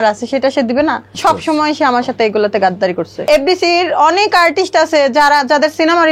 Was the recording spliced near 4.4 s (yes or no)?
no